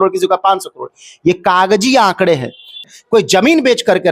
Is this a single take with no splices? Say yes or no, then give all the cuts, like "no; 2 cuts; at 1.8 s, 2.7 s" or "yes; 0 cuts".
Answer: no; 1 cut; at 2.8 s